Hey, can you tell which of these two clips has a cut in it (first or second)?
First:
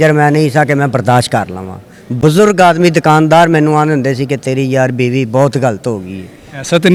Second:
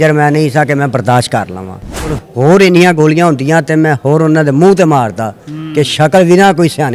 second